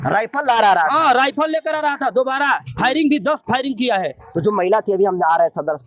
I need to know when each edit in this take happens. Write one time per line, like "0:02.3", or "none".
none